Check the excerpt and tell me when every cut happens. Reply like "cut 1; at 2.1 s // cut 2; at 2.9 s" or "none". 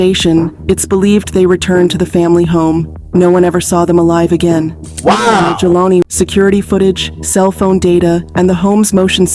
cut 1; at 6.0 s